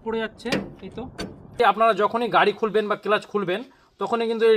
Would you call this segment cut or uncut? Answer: cut